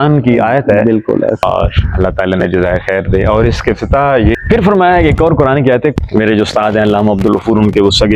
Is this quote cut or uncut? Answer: cut